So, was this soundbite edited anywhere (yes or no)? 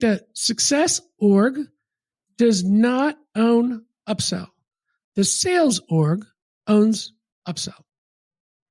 no